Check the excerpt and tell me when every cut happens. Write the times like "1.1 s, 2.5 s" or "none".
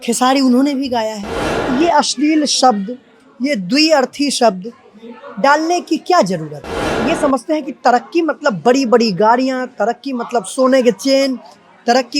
1.5 s, 6.9 s